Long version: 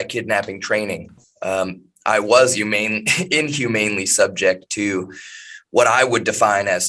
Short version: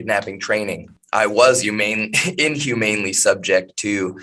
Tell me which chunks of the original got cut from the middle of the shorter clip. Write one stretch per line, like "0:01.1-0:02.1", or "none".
0:01.1-0:01.9